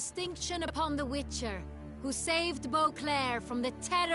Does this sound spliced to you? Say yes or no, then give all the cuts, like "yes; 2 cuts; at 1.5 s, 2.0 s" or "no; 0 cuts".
no; 0 cuts